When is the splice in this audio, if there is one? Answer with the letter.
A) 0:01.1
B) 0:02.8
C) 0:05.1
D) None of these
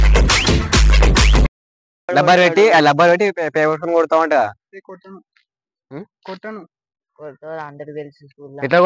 D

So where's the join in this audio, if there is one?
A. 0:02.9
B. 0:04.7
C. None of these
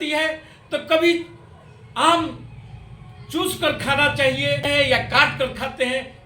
B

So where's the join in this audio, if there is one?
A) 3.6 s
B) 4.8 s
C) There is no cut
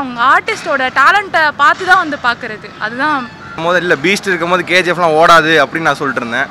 A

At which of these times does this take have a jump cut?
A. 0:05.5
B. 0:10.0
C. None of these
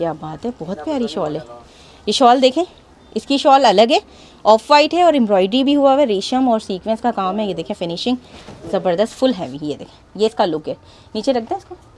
C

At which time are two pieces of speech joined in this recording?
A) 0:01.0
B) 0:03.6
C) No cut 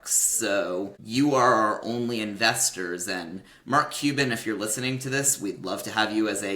A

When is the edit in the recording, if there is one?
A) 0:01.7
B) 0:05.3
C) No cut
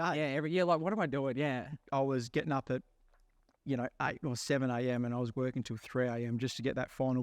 A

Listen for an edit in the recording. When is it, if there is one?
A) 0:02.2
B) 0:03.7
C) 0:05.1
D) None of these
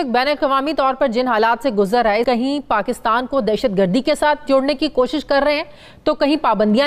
A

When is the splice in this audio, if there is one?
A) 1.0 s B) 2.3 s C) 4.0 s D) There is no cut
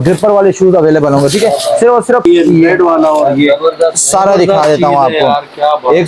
B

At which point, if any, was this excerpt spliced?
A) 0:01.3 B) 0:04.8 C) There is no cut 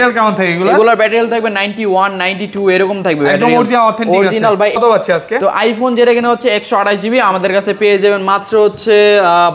B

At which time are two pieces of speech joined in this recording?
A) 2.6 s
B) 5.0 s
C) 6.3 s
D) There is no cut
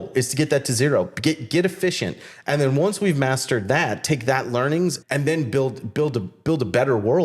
B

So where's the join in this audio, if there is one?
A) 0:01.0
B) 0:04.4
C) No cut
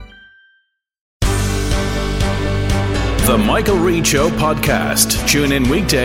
A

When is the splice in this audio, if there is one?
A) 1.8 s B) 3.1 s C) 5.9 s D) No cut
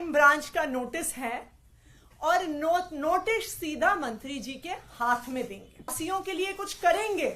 C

